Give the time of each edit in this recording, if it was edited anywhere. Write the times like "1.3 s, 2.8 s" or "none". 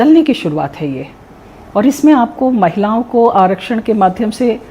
none